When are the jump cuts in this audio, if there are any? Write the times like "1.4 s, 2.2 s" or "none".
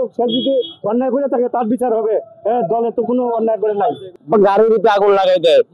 4.1 s